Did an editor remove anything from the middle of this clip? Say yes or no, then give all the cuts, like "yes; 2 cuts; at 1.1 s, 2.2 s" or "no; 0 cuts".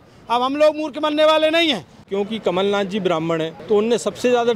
yes; 2 cuts; at 2.0 s, 3.6 s